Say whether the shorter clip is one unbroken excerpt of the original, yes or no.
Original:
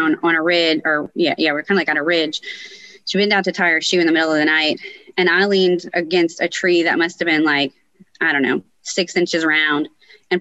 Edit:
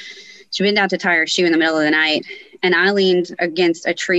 yes